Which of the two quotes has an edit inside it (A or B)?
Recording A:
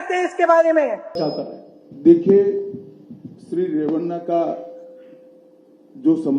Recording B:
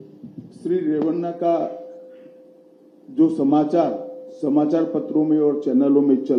A